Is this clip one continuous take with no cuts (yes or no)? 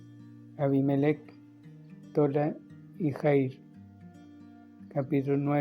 no